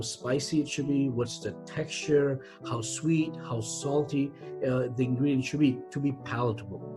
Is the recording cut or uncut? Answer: uncut